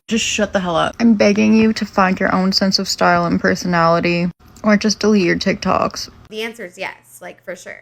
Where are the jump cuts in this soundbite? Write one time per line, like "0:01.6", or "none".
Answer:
0:00.9
0:06.2